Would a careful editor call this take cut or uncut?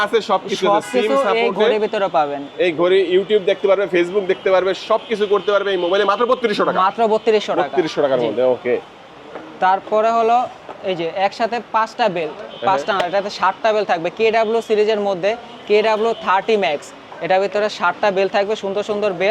uncut